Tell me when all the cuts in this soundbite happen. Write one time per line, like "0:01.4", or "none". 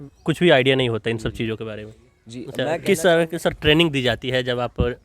0:02.5